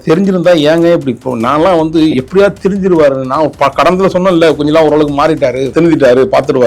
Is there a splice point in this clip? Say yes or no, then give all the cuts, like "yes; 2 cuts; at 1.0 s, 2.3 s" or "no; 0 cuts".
yes; 1 cut; at 5.6 s